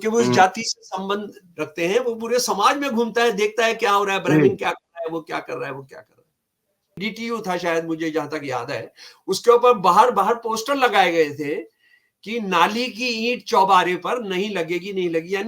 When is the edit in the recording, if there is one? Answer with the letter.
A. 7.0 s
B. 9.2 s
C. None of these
A